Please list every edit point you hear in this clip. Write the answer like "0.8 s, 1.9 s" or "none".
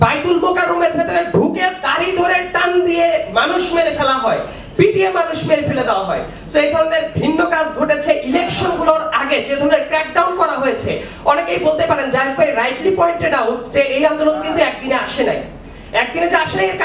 none